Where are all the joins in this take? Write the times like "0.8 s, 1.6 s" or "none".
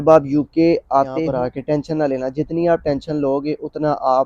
1.2 s